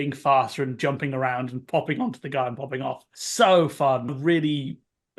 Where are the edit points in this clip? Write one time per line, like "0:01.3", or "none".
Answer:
0:04.2

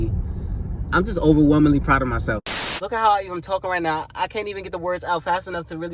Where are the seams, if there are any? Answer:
0:02.4

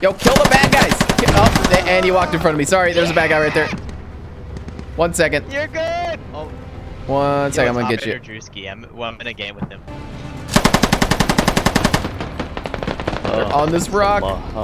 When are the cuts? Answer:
none

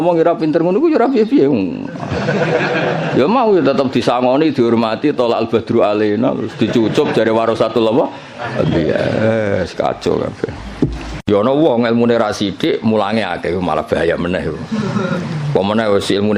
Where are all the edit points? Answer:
0:11.2

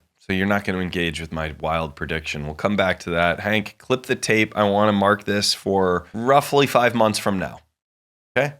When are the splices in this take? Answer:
0:06.1

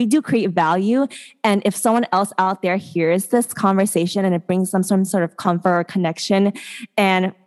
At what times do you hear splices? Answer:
none

